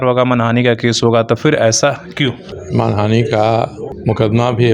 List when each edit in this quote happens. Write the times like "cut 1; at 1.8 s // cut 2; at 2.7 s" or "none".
cut 1; at 2.5 s // cut 2; at 4.0 s